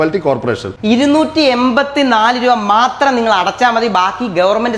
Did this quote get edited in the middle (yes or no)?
no